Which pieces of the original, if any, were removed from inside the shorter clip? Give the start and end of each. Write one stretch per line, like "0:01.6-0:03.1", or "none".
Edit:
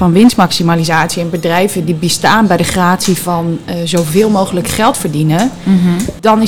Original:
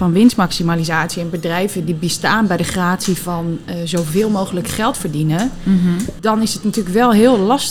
none